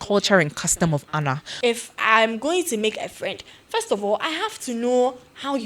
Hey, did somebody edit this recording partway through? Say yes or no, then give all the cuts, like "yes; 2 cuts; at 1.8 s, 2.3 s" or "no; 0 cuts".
yes; 1 cut; at 1.5 s